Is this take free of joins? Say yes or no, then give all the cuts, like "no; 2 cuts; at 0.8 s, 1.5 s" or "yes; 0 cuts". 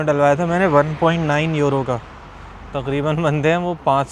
yes; 0 cuts